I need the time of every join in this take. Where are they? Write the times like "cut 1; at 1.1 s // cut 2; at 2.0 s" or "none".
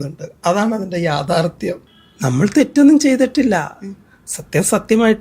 cut 1; at 1.9 s